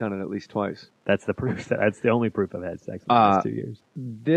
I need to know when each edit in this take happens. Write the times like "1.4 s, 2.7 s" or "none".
none

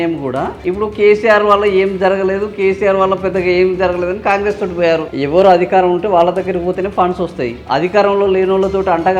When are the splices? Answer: 5.1 s

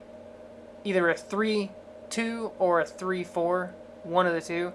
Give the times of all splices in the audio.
2.4 s

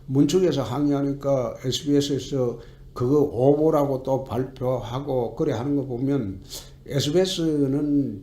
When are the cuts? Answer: 3.2 s

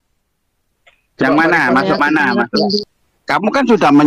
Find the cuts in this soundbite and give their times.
2.8 s

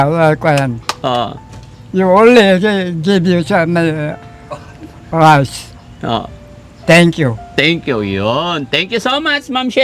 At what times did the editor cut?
none

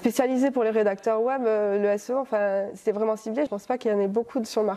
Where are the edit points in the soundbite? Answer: 3.5 s

